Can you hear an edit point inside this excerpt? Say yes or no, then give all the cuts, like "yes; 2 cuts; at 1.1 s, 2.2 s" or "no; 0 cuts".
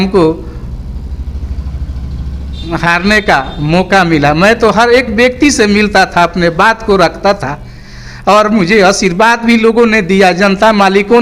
no; 0 cuts